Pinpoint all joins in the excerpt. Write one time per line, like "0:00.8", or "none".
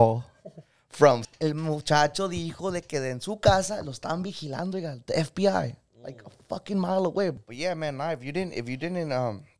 0:01.1
0:07.4